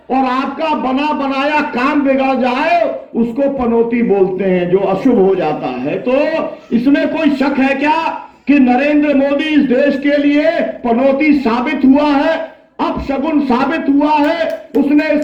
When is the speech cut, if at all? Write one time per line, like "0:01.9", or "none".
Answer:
none

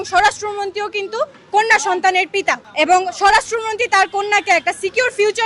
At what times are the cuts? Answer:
0:02.6

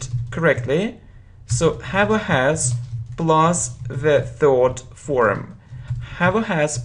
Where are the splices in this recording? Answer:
0:04.9

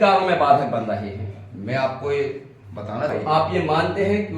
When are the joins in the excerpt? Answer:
0:03.1

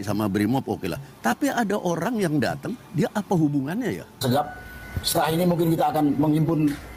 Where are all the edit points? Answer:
0:04.2

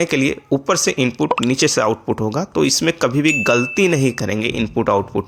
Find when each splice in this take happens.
none

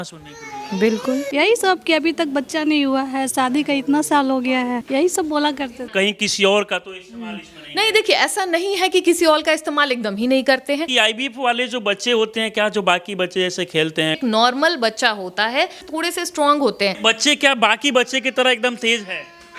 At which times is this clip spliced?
0:01.3
0:04.8
0:05.9
0:10.9
0:14.2
0:15.8
0:17.0

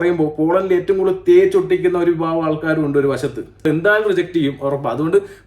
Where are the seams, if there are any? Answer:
0:03.6

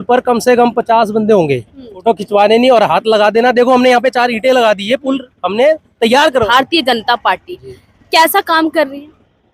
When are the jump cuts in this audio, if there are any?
0:02.0
0:06.4

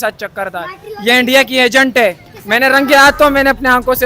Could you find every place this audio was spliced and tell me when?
0:02.3

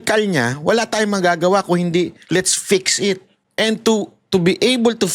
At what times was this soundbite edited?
0:03.4

